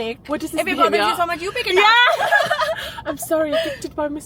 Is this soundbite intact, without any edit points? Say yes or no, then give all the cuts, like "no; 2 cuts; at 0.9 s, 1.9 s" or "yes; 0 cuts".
yes; 0 cuts